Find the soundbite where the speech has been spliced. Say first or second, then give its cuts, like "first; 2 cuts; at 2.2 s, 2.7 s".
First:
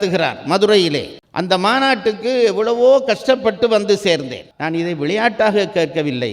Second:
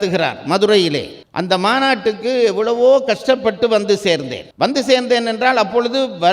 first; 1 cut; at 4.4 s